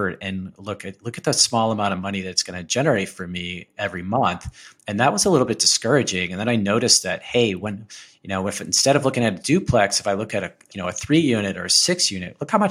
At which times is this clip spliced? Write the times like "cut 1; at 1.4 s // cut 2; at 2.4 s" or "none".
cut 1; at 10.7 s